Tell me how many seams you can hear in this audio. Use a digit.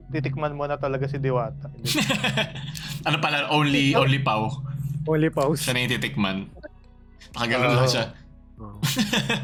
0